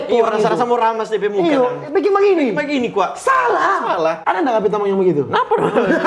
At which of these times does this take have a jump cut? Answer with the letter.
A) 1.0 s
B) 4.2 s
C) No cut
B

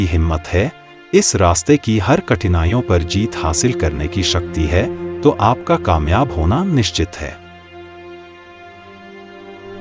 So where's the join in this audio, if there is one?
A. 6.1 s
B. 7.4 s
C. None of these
B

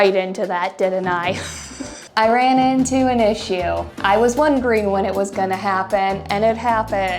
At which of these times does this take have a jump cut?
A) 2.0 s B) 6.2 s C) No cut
A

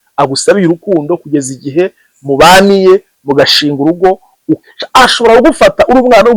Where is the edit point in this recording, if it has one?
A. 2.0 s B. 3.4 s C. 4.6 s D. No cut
C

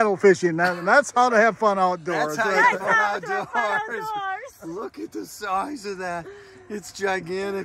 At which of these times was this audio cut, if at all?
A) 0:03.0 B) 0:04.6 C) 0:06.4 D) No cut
D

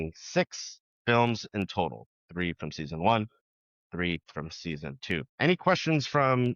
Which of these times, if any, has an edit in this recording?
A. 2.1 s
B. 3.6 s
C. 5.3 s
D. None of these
C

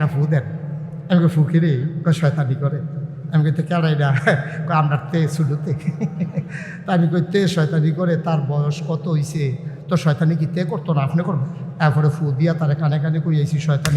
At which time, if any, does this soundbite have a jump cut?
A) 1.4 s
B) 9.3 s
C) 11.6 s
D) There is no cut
C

